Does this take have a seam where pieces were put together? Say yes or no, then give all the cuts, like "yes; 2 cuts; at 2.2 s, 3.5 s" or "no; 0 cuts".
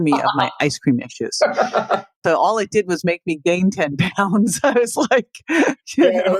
yes; 1 cut; at 2.2 s